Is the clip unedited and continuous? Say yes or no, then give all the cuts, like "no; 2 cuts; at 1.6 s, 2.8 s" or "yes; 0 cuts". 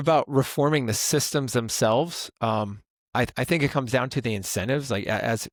yes; 0 cuts